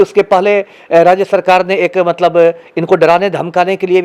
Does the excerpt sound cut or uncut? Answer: uncut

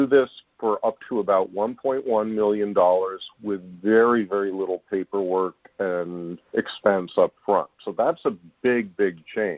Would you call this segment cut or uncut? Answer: cut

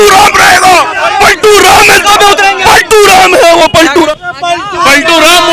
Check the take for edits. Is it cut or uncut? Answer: cut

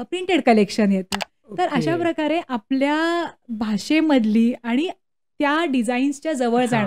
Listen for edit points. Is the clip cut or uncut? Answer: uncut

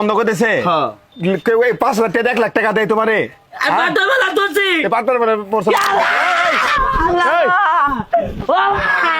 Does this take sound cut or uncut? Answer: cut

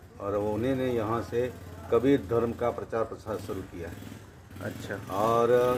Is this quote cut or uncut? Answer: uncut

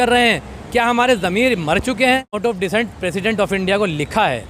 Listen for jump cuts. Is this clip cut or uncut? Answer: cut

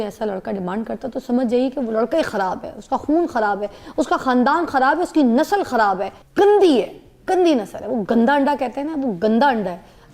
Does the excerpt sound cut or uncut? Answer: cut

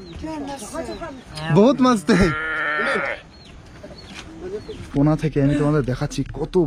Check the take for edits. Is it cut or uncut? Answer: cut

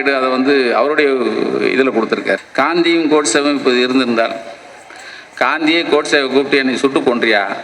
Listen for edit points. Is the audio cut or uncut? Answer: cut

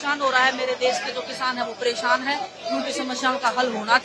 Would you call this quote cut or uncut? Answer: uncut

